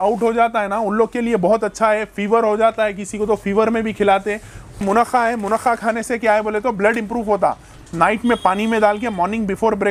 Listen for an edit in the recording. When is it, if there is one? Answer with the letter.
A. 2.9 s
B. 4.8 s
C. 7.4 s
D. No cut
B